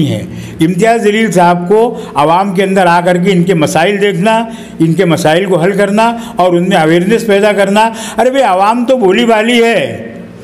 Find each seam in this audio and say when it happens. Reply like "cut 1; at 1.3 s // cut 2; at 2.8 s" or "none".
none